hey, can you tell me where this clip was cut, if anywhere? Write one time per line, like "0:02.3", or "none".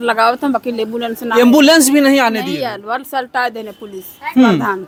none